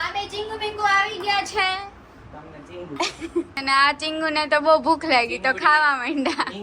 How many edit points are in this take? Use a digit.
1